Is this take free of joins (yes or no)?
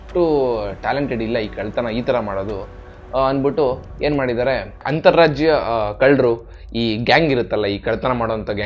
yes